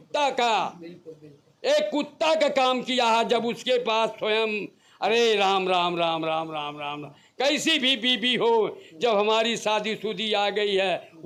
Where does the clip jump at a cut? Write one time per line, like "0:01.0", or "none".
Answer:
none

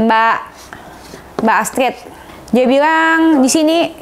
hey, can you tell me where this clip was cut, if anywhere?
none

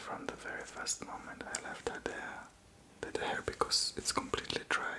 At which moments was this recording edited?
0:03.1

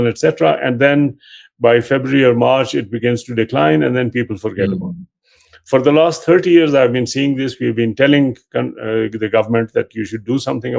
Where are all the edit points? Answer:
none

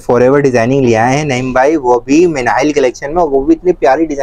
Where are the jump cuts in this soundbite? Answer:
none

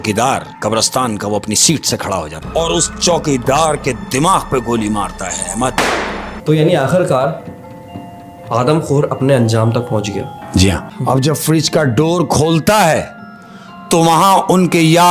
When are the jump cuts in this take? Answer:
0:02.4
0:05.8
0:10.9

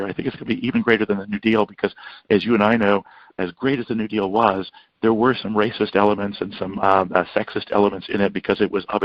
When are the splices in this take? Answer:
none

